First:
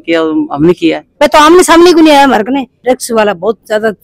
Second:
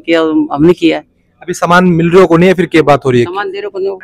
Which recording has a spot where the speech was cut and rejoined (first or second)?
first